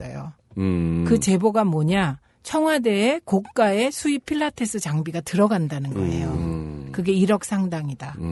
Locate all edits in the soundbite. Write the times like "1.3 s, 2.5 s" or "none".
none

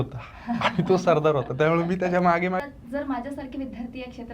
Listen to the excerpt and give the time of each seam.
2.6 s

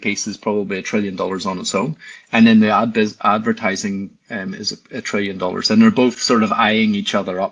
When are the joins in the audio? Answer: none

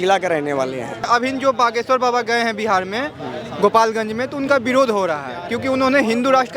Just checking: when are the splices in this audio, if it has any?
1.0 s

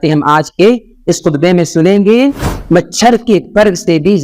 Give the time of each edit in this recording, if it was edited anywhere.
2.5 s

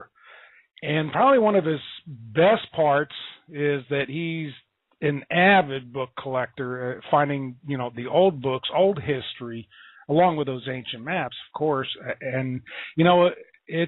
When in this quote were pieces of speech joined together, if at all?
5.2 s

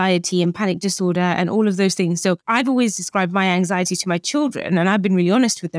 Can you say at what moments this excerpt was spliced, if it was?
2.4 s

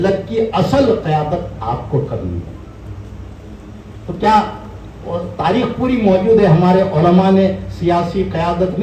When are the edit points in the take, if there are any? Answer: none

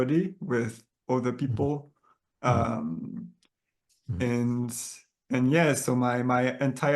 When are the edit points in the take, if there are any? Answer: none

